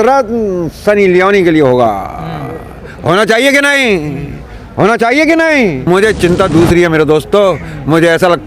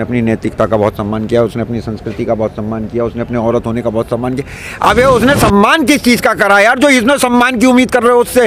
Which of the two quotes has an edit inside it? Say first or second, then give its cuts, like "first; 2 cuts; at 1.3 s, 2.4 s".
first; 1 cut; at 5.9 s